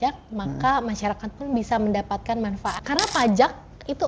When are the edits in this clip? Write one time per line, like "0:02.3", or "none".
0:02.8